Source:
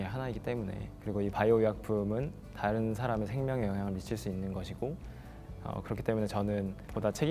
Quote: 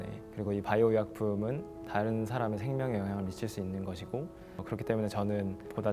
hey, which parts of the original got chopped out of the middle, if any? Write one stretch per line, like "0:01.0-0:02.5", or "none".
0:05.3-0:05.8